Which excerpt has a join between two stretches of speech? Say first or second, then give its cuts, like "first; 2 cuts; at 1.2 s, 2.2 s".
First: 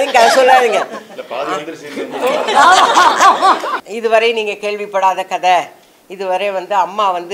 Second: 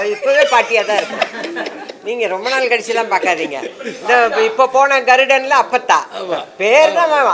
first; 1 cut; at 3.8 s